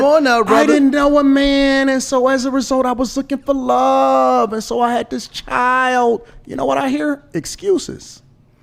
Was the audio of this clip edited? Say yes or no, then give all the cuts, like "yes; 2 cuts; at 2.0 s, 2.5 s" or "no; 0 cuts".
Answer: no; 0 cuts